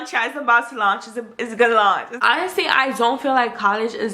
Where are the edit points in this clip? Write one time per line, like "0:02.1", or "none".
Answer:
0:02.1